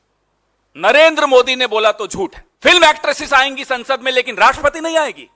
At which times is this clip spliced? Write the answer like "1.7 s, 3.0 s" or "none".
2.4 s